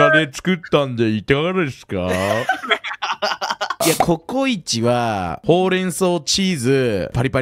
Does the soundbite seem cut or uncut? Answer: uncut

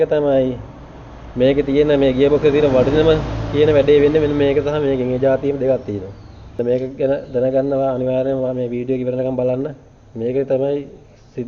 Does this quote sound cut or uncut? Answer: uncut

